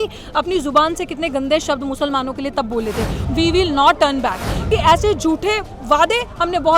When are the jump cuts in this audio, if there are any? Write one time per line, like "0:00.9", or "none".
0:03.2
0:04.7